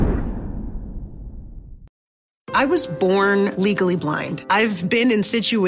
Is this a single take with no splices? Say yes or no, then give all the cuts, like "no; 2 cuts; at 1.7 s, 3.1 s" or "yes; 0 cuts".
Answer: no; 1 cut; at 1.9 s